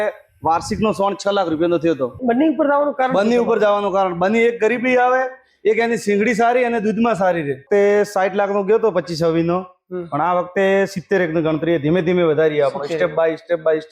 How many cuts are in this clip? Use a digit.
2